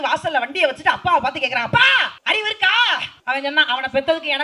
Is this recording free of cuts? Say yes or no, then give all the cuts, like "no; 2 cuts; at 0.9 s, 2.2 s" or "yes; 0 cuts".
no; 2 cuts; at 2.1 s, 3.1 s